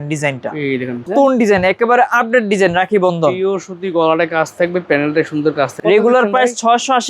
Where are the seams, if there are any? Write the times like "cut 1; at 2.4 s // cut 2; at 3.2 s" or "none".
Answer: cut 1; at 1.1 s // cut 2; at 5.7 s